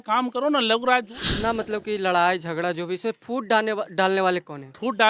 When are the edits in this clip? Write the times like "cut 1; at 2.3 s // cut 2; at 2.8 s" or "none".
cut 1; at 1.2 s